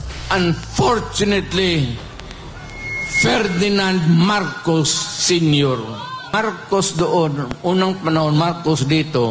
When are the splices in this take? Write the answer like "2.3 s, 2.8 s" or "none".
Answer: 6.3 s

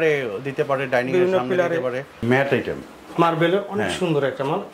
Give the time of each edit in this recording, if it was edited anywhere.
2.1 s

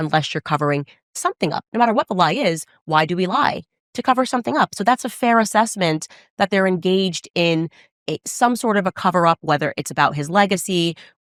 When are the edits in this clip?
none

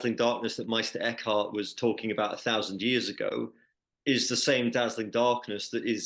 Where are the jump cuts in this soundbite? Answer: none

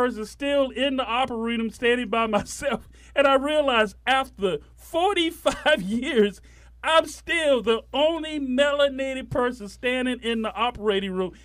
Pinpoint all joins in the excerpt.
none

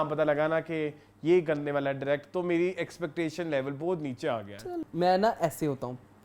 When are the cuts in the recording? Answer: 4.8 s

